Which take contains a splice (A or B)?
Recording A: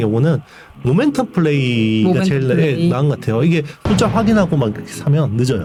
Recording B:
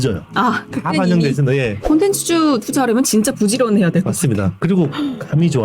B